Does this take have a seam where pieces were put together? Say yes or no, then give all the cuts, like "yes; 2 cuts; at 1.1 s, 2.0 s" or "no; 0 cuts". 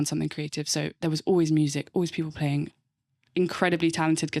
no; 0 cuts